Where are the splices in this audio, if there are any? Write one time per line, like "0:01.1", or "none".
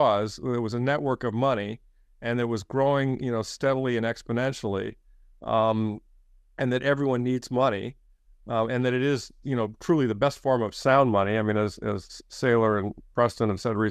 0:07.5